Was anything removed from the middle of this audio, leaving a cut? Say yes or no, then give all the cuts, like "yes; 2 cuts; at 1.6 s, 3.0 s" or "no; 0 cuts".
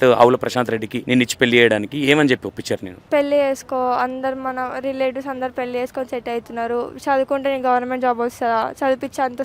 yes; 2 cuts; at 0.9 s, 2.9 s